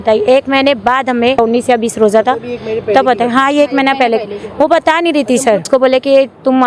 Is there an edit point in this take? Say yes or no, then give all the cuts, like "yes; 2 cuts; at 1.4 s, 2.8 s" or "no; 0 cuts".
yes; 2 cuts; at 1.4 s, 5.6 s